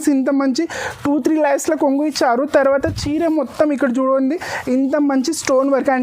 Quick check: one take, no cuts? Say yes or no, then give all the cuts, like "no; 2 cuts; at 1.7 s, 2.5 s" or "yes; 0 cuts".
yes; 0 cuts